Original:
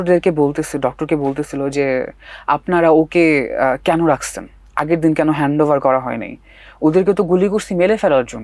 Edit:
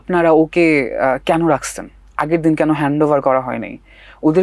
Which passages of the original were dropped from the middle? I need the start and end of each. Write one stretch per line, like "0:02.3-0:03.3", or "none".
none